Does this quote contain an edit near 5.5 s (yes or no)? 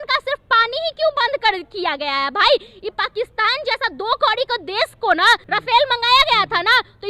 yes